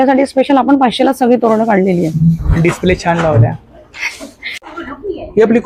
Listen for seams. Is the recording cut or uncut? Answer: uncut